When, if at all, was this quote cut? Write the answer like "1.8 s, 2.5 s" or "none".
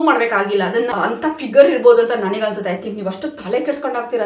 0.9 s